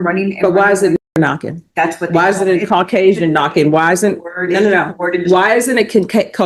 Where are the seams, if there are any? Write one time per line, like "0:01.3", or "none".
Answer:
none